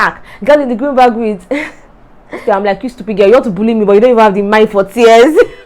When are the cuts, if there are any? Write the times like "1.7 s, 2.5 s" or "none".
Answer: 2.4 s